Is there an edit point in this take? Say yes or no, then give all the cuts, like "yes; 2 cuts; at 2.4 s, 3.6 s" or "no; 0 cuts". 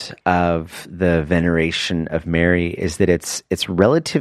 no; 0 cuts